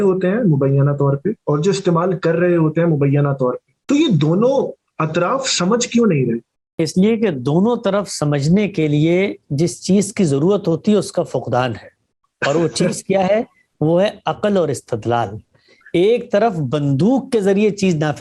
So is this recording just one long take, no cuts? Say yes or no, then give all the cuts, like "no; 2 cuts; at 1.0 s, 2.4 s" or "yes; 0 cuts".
no; 2 cuts; at 3.7 s, 6.6 s